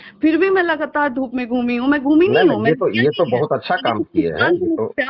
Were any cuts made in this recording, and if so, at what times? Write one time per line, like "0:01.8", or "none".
none